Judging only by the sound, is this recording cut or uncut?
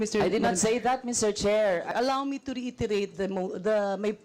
cut